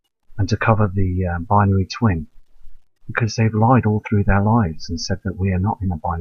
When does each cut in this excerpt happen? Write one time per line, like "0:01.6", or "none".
none